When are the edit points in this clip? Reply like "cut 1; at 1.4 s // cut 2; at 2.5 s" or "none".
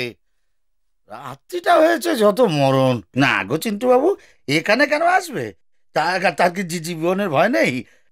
cut 1; at 3.1 s